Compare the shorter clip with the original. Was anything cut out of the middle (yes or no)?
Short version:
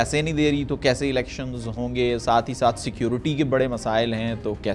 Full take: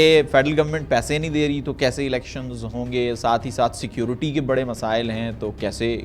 no